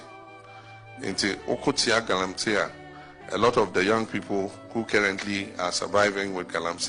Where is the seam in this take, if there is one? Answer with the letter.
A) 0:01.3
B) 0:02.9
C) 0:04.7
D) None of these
D